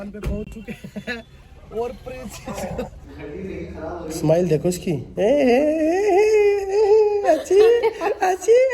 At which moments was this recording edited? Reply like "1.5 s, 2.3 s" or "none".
3.1 s